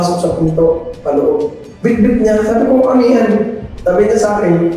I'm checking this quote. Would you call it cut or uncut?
cut